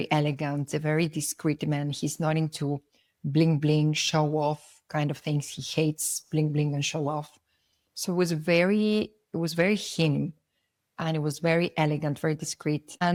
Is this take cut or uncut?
uncut